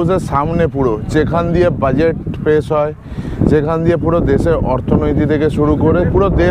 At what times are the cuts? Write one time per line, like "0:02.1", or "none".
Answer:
none